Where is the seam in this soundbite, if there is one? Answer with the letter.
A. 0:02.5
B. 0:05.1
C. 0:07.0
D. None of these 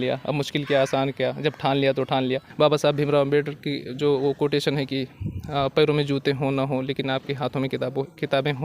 A